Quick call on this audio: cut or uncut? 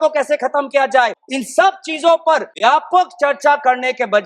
cut